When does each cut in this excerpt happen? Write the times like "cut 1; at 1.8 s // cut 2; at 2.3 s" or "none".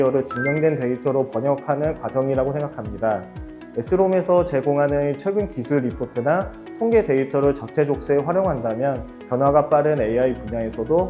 cut 1; at 9.1 s